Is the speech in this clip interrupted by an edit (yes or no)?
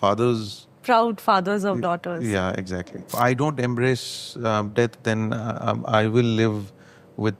yes